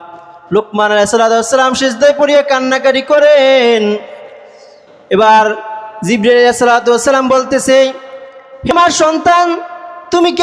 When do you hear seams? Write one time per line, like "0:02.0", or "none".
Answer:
0:08.7